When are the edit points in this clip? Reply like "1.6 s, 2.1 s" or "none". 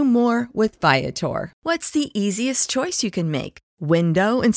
1.5 s